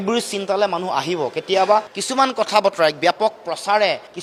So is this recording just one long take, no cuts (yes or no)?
yes